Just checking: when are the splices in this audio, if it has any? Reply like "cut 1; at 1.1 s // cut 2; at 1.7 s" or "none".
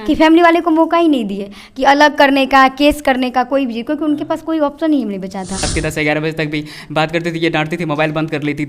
cut 1; at 5.7 s